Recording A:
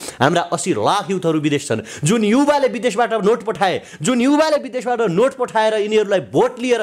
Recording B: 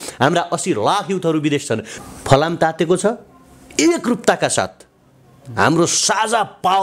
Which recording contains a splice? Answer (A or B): B